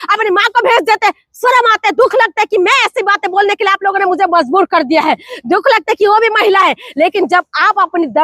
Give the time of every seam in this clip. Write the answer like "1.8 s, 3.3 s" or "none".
none